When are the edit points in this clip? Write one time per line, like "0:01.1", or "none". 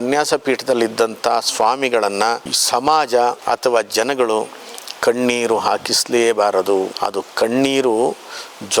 0:02.5
0:03.4
0:06.9